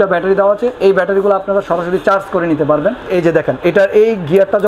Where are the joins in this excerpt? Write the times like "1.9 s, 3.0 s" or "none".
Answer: 3.1 s